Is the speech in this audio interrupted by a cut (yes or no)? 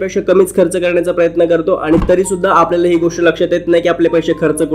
no